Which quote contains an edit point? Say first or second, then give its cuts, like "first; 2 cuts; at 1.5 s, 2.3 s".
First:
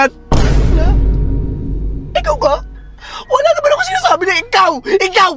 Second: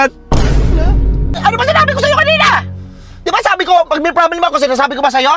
second; 1 cut; at 1.3 s